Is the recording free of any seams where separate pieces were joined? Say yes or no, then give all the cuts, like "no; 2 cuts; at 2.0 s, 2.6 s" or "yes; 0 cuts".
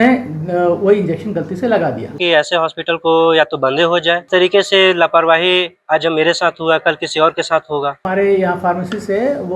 no; 3 cuts; at 2.2 s, 4.3 s, 8.0 s